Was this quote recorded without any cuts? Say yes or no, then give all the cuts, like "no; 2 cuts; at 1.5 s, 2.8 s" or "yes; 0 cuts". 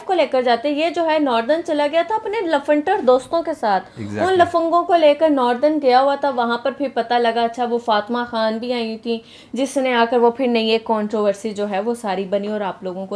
yes; 0 cuts